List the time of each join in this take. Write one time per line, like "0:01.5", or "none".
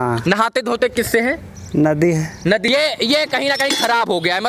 0:02.7